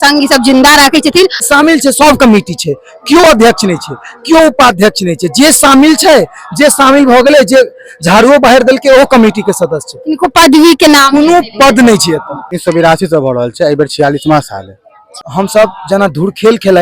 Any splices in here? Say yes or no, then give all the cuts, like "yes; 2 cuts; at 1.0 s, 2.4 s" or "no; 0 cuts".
yes; 3 cuts; at 1.5 s, 12.6 s, 15.2 s